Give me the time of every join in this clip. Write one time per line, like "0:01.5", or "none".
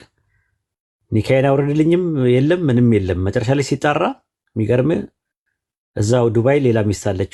none